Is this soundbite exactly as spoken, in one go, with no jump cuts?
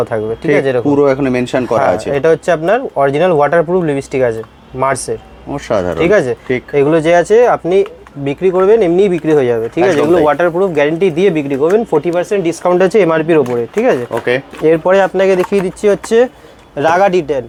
yes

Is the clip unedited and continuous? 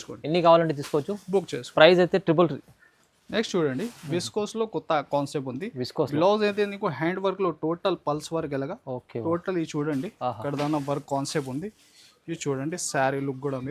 yes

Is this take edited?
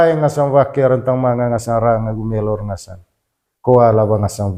no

